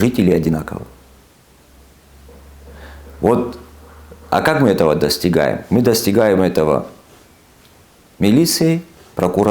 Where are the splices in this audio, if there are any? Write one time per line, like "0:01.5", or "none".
none